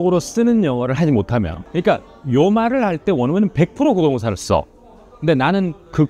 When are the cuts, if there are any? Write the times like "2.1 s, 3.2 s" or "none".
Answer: 1.6 s